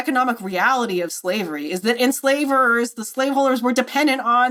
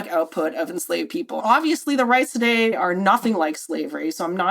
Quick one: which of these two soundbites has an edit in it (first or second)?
second